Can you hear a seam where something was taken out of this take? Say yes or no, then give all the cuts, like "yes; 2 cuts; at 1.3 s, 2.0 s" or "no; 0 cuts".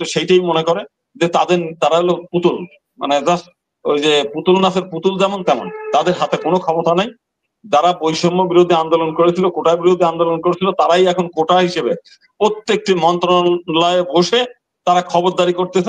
no; 0 cuts